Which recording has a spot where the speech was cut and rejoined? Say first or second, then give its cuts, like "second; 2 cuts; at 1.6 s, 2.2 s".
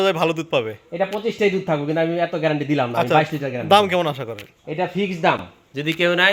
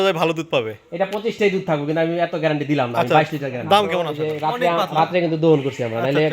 second; 1 cut; at 4.2 s